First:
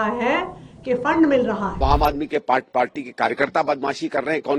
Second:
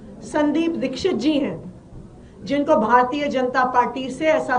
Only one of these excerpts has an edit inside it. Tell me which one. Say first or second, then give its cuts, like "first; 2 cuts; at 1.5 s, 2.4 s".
first; 1 cut; at 1.8 s